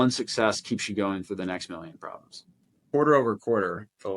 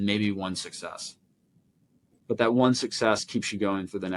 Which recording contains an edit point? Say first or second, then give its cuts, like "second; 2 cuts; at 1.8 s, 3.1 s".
first; 1 cut; at 2.7 s